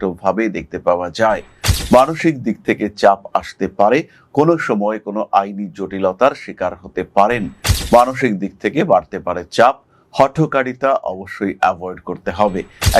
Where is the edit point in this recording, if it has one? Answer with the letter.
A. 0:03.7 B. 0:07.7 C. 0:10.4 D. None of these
B